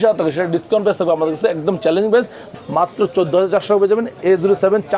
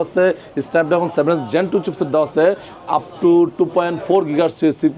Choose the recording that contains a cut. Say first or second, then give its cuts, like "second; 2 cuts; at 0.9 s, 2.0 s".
first; 1 cut; at 2.5 s